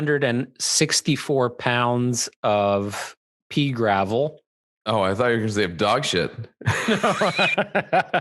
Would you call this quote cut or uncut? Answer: uncut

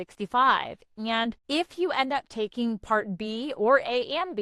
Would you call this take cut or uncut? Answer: cut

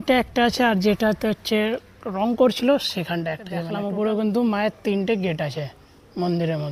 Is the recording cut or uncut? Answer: uncut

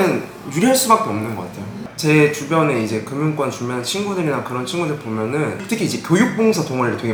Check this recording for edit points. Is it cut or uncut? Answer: uncut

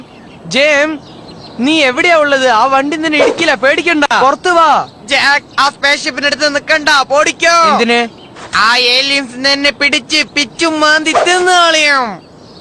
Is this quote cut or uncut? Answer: cut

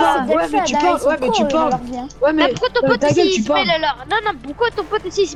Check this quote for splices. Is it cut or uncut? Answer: uncut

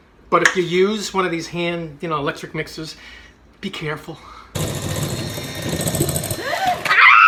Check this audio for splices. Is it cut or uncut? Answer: uncut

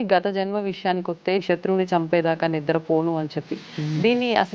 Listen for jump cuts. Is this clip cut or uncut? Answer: cut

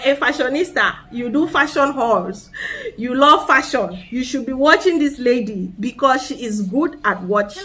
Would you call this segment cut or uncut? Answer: uncut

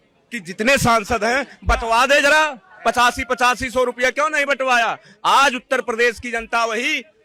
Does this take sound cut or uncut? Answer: uncut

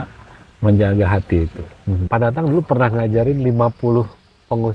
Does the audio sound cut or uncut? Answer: cut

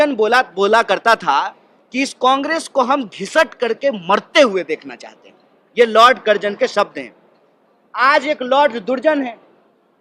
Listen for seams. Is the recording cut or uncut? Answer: uncut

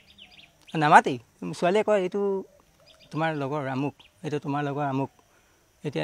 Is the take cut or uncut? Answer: uncut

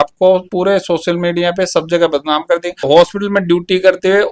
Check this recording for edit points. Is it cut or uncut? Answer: cut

